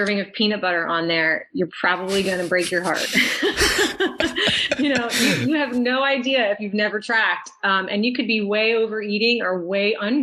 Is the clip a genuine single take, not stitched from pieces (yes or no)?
yes